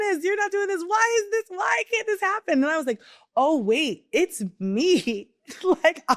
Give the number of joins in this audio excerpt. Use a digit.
0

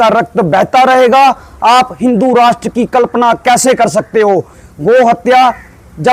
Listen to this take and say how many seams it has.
1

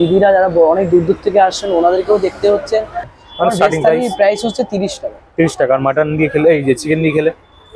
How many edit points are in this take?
1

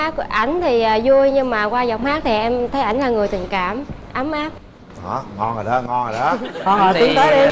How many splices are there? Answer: 0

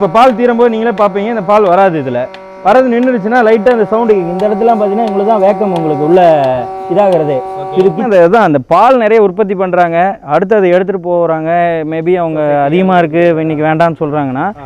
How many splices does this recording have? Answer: 1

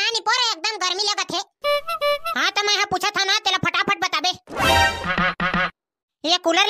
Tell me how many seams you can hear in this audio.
1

